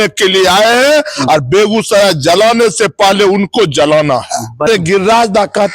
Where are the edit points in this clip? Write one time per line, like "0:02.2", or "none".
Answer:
0:04.7